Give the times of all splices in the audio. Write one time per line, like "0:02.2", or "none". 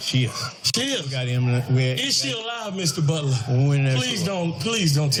none